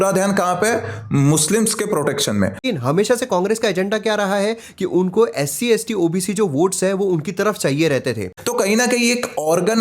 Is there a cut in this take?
yes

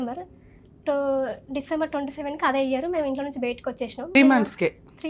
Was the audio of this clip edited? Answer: yes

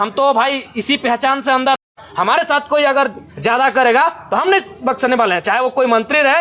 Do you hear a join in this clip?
yes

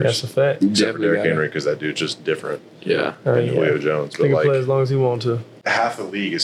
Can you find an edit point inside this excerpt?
yes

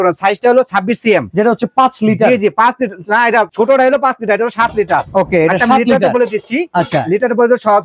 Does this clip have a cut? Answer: no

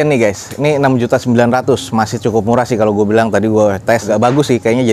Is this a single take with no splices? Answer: yes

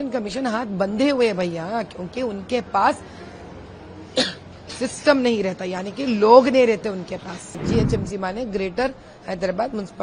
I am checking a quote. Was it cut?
yes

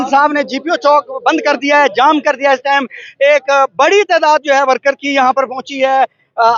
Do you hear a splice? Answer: no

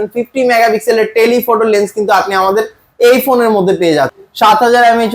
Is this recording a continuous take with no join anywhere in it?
no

